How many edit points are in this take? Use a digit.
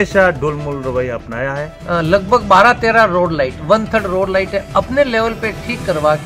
1